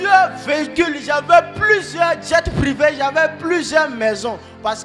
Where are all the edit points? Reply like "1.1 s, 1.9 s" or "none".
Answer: none